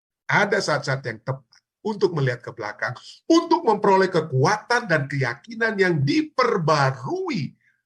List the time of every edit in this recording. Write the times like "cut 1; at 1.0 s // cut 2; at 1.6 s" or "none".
none